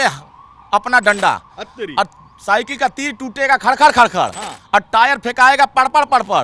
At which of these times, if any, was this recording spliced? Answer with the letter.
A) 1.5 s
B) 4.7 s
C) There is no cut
C